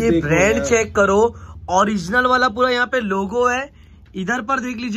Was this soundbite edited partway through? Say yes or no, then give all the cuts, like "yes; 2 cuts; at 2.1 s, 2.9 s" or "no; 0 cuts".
no; 0 cuts